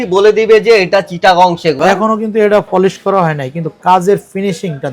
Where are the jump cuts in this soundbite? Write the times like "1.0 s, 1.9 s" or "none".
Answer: 1.8 s